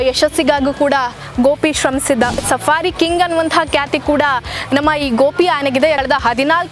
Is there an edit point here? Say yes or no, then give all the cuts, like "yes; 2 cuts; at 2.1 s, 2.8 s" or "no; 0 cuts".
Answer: yes; 2 cuts; at 2.4 s, 6.0 s